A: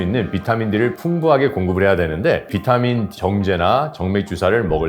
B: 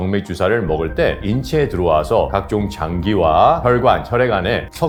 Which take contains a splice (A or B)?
A